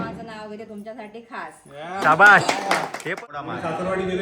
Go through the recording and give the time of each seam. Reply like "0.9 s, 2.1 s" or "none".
3.1 s